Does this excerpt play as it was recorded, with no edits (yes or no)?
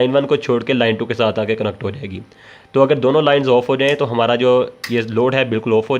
yes